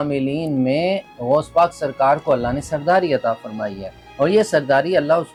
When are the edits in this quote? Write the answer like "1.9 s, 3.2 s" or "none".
none

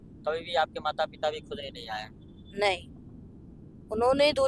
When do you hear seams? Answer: none

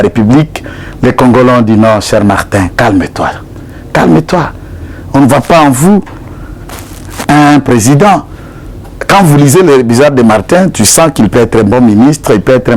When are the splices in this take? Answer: none

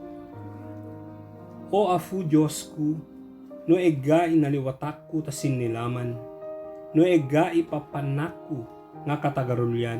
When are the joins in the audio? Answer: 1.6 s

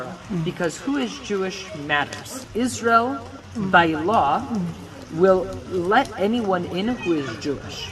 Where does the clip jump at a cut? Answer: 2.4 s

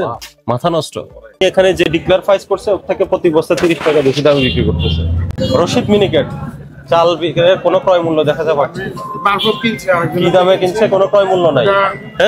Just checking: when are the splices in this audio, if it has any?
1.4 s, 5.3 s

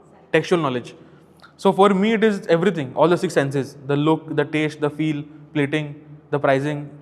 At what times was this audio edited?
none

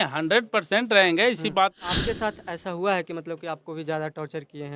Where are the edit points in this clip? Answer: 1.8 s

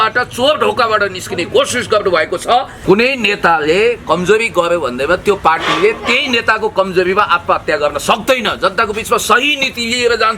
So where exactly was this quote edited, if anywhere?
2.7 s

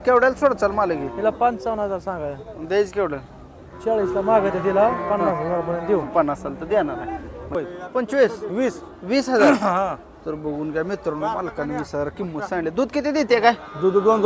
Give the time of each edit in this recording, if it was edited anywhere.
7.5 s

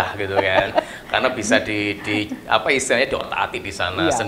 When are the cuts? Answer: none

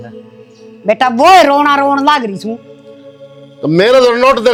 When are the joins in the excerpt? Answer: none

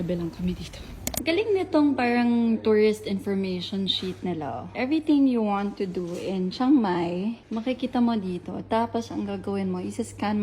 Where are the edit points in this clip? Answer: 1.1 s, 4.7 s

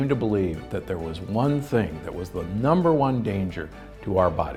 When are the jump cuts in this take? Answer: none

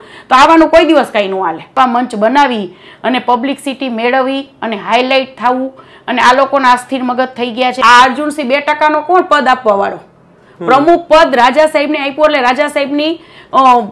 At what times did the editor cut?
1.8 s, 7.8 s

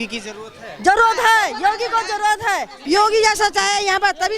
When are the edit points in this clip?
2.7 s

